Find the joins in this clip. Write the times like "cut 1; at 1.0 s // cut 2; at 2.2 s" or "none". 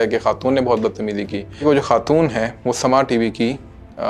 cut 1; at 1.6 s

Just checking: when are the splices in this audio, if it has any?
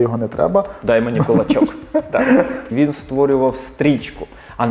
cut 1; at 2.6 s

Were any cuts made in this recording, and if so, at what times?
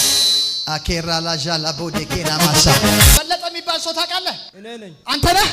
cut 1; at 3.2 s

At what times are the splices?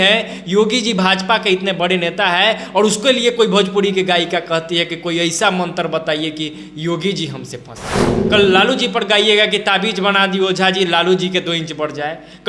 cut 1; at 8.2 s

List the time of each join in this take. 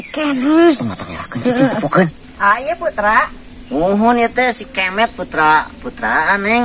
cut 1; at 2.2 s

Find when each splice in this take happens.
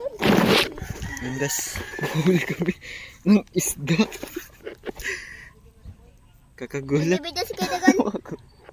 none

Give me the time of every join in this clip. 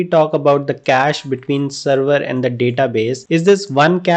none

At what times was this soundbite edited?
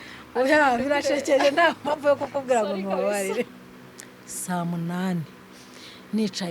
cut 1; at 3.5 s

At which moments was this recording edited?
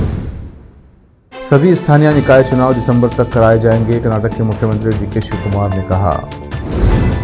cut 1; at 1.3 s

